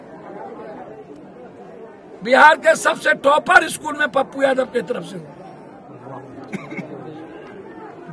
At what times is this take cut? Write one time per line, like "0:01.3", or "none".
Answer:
none